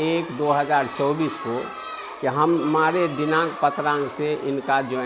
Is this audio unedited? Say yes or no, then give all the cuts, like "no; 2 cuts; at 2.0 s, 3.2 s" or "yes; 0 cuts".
yes; 0 cuts